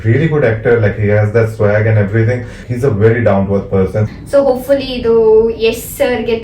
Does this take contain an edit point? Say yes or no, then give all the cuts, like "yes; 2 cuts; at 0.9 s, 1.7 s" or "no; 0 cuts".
yes; 2 cuts; at 2.6 s, 4.1 s